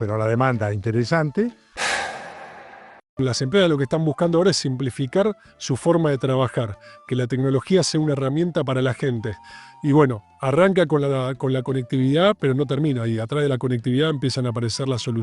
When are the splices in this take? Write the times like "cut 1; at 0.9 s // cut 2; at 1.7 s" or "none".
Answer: cut 1; at 1.7 s // cut 2; at 3.2 s

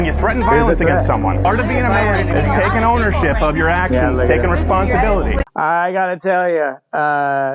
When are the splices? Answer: cut 1; at 5.4 s

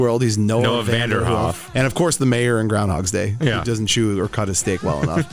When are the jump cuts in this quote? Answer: cut 1; at 1.7 s

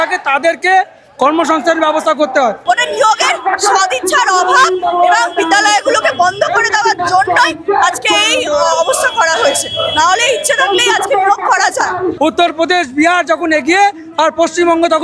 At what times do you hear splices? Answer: cut 1; at 2.6 s // cut 2; at 12.1 s

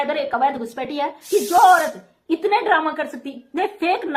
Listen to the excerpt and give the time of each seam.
cut 1; at 1.2 s

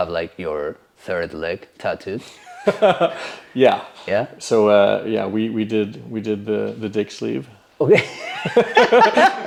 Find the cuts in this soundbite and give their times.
none

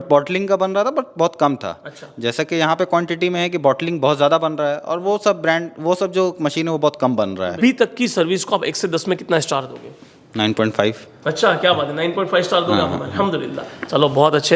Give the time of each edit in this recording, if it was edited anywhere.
cut 1; at 7.6 s

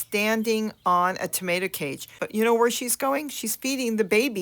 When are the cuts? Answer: cut 1; at 2.2 s

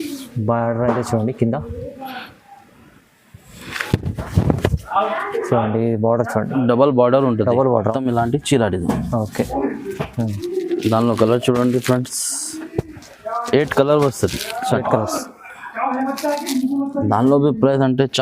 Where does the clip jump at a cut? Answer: cut 1; at 7.9 s

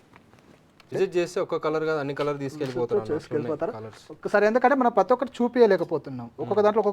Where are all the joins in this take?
cut 1; at 0.9 s

